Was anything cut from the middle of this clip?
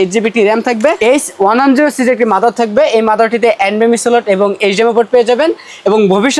yes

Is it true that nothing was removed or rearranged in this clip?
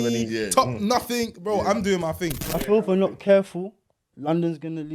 no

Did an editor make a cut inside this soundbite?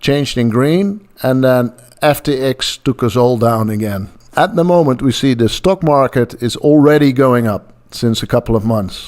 yes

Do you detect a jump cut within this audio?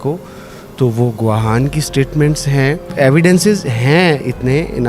yes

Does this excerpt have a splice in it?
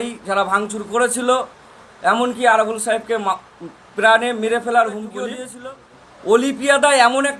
yes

